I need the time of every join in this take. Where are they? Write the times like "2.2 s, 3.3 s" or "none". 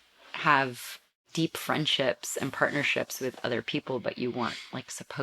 1.3 s